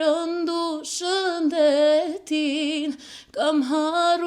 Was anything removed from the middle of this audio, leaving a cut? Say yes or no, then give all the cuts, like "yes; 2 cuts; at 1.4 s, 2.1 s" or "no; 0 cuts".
no; 0 cuts